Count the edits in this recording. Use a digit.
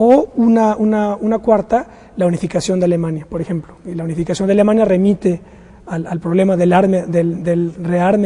0